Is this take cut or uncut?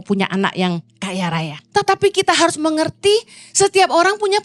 cut